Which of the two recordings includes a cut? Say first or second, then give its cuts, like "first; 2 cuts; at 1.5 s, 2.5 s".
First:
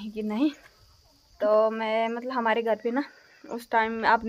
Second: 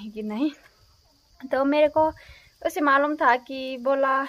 first; 1 cut; at 1.2 s